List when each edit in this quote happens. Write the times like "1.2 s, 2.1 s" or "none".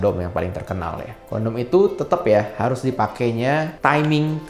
none